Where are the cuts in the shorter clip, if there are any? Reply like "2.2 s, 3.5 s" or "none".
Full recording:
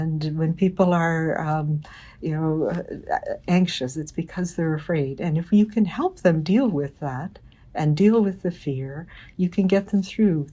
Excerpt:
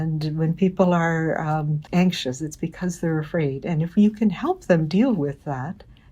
1.9 s